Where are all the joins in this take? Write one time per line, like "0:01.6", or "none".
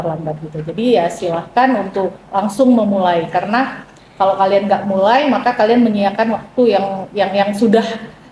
none

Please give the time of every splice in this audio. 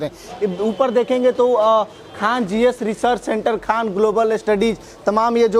none

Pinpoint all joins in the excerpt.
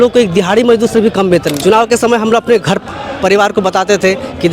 0:01.5

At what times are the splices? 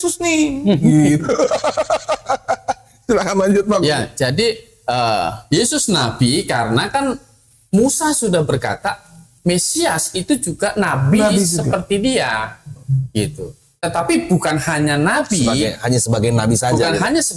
none

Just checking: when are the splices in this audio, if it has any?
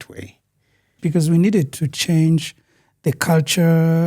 0:00.9

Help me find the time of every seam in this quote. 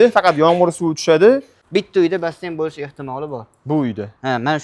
0:01.5

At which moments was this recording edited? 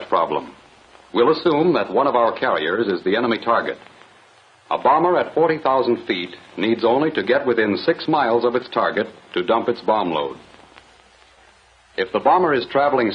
0:12.0

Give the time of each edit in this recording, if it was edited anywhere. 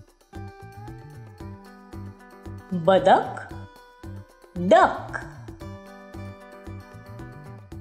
none

